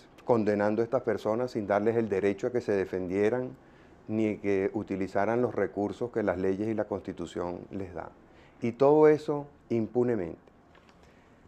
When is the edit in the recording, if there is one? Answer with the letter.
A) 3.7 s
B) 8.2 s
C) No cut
B